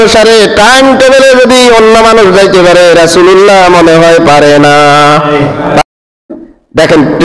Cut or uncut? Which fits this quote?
cut